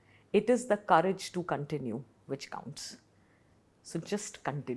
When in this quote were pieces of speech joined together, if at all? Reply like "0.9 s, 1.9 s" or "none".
none